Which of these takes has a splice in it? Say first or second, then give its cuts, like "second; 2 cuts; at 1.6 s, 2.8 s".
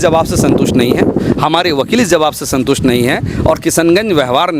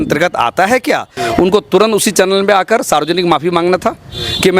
second; 1 cut; at 1.1 s